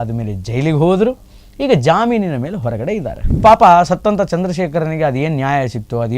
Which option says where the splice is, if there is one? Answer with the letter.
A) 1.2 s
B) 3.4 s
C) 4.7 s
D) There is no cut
B